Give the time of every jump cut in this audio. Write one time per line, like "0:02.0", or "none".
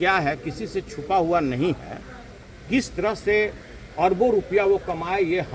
none